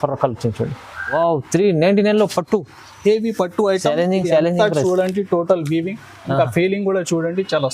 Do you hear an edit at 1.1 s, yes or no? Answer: yes